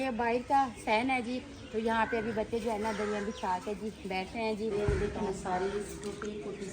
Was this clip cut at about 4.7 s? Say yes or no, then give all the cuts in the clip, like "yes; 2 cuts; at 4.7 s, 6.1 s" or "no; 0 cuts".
yes; 1 cut; at 4.7 s